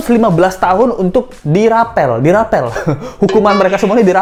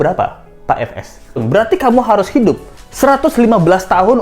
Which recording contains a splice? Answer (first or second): second